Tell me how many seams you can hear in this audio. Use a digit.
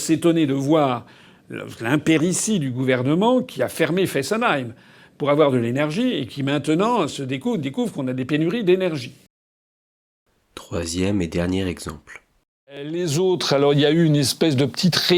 0